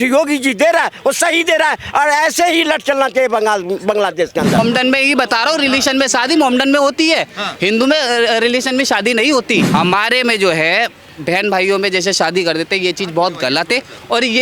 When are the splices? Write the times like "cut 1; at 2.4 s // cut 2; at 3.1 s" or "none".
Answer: cut 1; at 4.6 s // cut 2; at 9.7 s